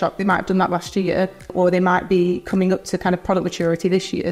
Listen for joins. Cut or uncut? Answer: cut